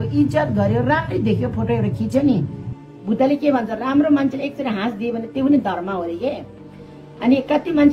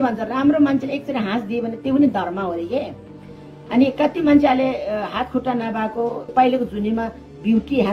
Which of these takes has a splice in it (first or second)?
second